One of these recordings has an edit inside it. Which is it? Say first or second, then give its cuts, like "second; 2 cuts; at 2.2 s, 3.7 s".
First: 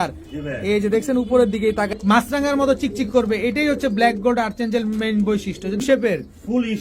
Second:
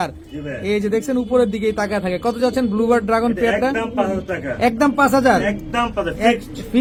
first; 2 cuts; at 1.9 s, 5.8 s